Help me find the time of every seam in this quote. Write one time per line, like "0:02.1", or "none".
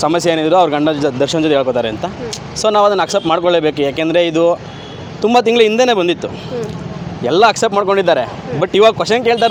none